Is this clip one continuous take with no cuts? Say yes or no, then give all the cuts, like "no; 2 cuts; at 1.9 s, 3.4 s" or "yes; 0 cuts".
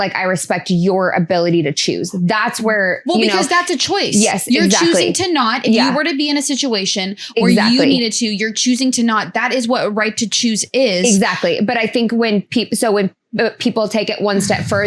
yes; 0 cuts